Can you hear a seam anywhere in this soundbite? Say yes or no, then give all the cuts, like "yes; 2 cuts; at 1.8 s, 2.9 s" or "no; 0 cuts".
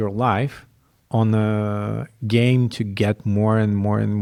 no; 0 cuts